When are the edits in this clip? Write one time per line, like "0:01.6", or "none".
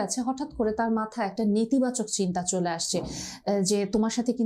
none